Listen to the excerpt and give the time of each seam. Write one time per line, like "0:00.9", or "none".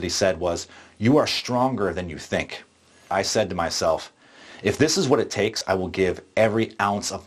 0:03.1
0:05.6